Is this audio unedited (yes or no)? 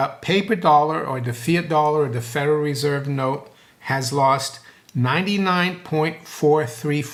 yes